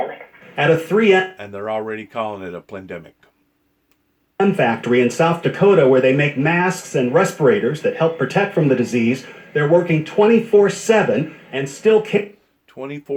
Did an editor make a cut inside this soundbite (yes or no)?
no